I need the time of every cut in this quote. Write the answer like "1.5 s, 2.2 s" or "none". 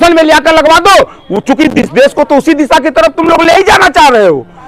none